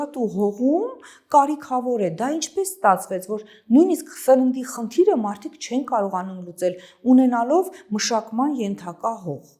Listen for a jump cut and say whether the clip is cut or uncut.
uncut